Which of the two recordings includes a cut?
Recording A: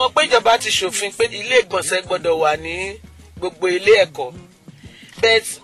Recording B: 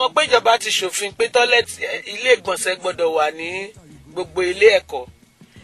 A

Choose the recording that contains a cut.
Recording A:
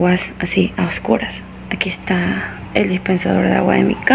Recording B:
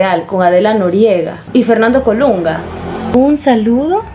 B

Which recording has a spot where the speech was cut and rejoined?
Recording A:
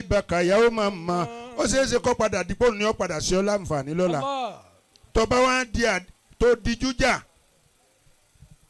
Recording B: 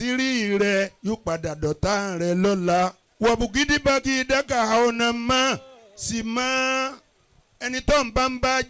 B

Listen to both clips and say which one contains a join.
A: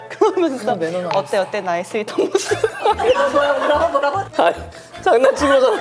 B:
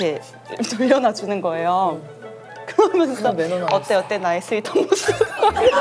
A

